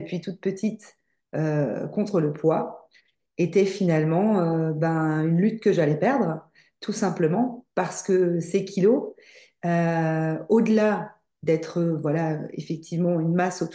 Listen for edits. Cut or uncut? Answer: uncut